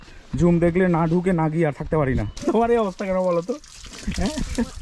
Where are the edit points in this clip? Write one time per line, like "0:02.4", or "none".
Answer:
0:02.4